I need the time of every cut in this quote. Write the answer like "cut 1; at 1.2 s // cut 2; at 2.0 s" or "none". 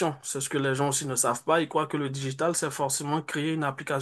none